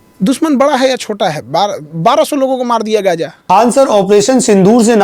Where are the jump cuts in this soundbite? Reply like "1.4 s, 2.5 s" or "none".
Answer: 3.3 s